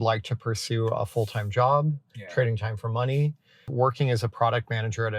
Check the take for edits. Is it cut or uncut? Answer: cut